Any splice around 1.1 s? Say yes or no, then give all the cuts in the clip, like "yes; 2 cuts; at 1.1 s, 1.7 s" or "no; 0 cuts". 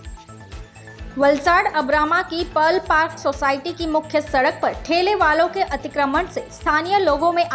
yes; 1 cut; at 1.1 s